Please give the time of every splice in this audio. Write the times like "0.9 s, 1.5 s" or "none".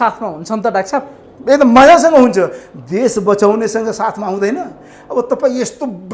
none

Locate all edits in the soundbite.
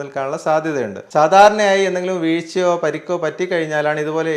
1.0 s

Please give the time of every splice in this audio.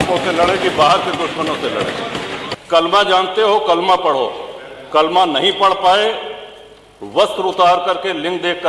2.5 s

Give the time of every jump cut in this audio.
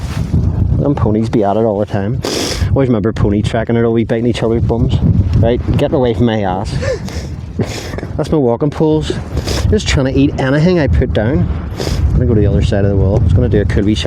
none

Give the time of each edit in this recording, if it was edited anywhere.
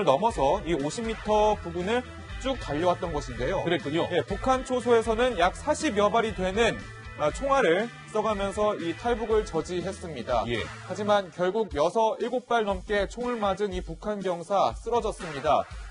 14.2 s

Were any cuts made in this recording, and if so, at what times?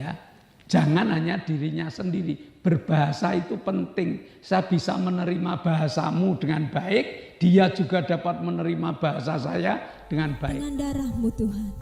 10.4 s

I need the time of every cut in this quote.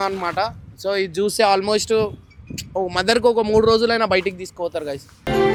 none

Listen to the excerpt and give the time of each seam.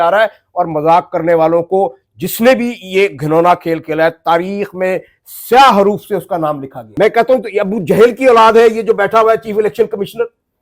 6.8 s

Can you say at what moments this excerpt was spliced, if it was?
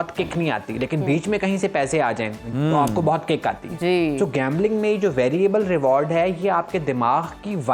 none

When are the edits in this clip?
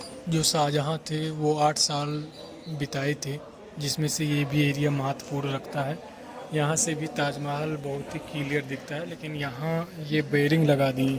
none

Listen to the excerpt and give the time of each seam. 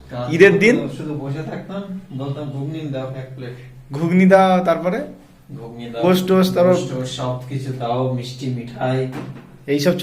6.0 s

